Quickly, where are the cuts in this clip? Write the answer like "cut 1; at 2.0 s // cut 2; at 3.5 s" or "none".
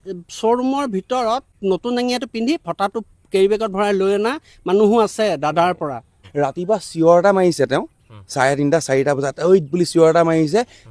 cut 1; at 1.5 s // cut 2; at 6.2 s